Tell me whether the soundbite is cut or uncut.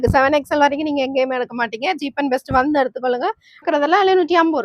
cut